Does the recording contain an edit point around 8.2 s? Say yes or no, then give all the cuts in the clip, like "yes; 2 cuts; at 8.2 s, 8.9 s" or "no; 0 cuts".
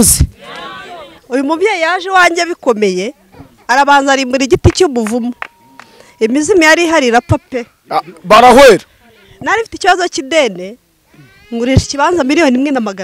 no; 1 cut; at 1.1 s